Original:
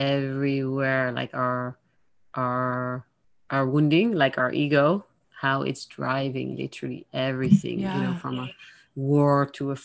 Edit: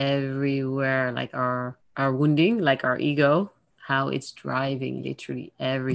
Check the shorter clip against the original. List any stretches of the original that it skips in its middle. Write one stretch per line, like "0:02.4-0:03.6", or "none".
0:01.8-0:03.3